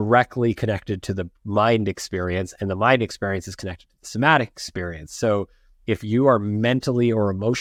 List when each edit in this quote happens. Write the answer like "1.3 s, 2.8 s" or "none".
none

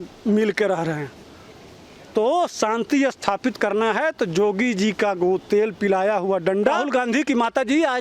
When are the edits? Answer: 6.8 s

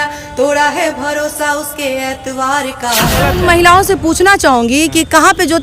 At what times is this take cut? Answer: 3.3 s

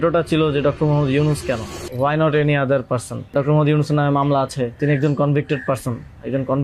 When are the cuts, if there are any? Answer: 1.8 s, 3.3 s, 4.8 s

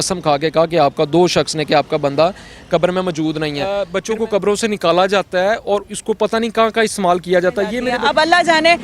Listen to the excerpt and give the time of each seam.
3.8 s, 7.9 s

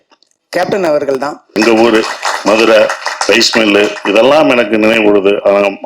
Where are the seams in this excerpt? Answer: 1.6 s

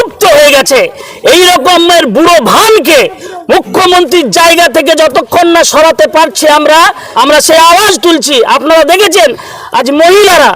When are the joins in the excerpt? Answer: 7.0 s

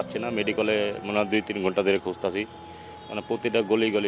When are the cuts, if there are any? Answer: none

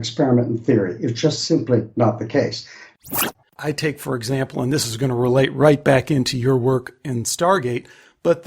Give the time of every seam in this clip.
2.9 s

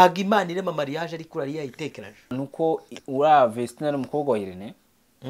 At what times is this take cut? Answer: 2.3 s

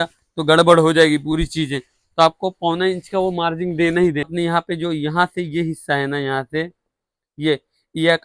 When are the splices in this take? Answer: 4.3 s

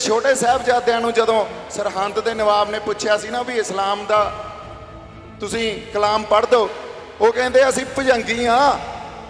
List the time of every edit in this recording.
none

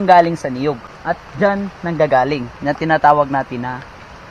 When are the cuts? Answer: 0.9 s

